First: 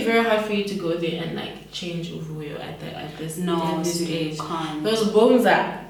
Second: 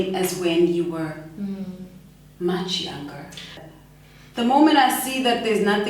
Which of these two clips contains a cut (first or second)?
second